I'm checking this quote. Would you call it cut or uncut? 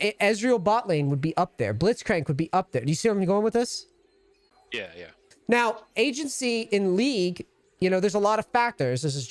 uncut